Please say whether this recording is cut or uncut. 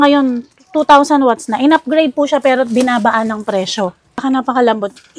cut